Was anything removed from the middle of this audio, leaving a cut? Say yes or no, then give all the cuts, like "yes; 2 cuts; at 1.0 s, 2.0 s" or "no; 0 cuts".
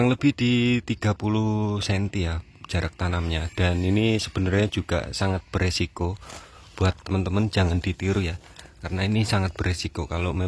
no; 0 cuts